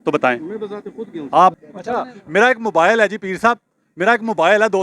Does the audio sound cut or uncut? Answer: cut